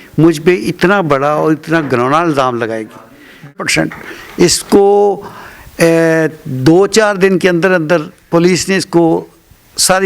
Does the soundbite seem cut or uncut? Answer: cut